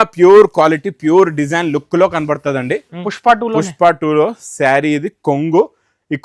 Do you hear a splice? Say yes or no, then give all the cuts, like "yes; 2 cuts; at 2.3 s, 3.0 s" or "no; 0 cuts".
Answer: yes; 1 cut; at 3.0 s